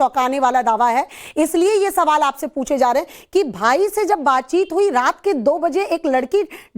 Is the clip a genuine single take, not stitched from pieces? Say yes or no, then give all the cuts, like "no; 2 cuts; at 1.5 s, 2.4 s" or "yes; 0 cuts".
no; 1 cut; at 2.6 s